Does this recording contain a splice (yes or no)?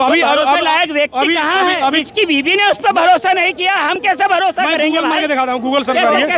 yes